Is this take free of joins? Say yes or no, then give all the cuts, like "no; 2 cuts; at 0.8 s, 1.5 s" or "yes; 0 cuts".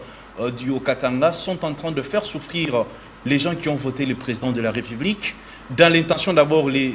yes; 0 cuts